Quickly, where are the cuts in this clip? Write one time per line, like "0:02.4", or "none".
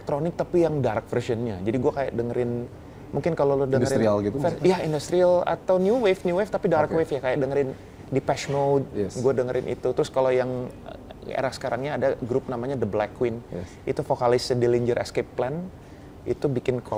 none